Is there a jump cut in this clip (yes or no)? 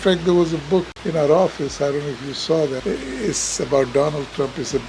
yes